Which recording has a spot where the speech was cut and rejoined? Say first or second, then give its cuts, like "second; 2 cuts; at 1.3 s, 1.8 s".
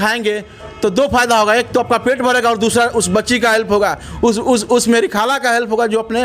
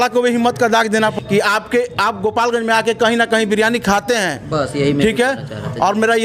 second; 1 cut; at 1.1 s